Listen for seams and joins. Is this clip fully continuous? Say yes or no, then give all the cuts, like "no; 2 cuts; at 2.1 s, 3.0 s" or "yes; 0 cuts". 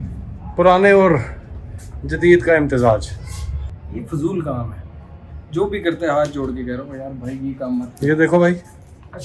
yes; 0 cuts